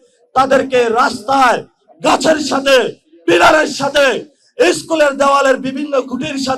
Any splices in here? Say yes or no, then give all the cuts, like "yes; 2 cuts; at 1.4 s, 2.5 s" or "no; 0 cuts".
no; 0 cuts